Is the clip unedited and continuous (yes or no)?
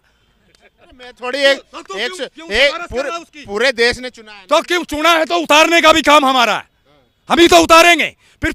yes